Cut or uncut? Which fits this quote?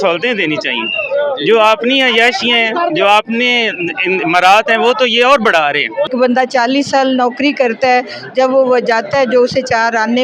cut